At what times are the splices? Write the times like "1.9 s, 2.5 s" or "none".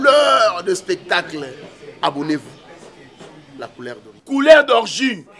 4.1 s